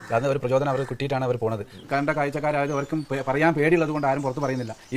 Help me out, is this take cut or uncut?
cut